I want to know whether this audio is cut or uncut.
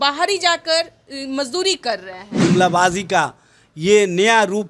cut